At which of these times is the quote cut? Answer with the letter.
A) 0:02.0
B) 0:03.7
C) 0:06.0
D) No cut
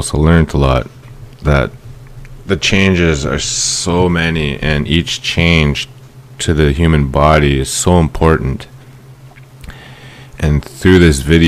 C